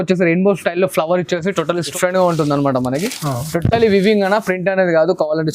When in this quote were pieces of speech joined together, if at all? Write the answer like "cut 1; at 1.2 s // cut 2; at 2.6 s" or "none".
cut 1; at 1.9 s